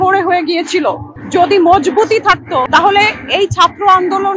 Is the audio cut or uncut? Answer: cut